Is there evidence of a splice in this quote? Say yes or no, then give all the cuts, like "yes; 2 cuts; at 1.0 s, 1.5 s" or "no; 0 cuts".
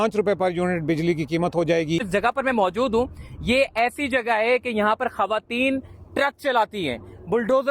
yes; 1 cut; at 2.0 s